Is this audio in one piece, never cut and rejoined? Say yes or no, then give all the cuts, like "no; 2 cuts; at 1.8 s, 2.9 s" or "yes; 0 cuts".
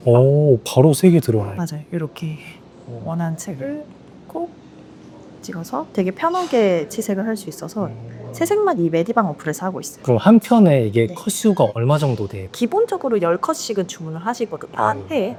yes; 0 cuts